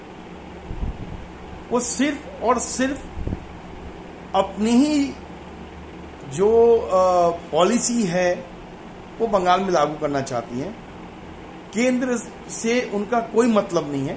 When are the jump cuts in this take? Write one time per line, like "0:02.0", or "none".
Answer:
none